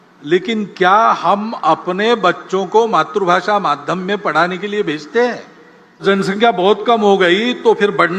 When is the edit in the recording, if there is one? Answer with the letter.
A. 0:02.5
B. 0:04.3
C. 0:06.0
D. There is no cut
C